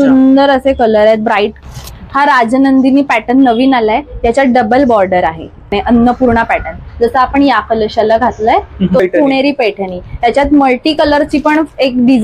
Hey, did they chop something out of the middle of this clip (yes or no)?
yes